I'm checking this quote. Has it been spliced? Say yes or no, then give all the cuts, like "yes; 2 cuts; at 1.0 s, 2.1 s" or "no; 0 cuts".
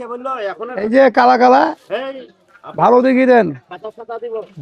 no; 0 cuts